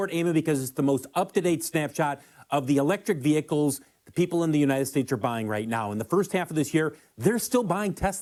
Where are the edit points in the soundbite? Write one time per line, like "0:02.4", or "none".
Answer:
none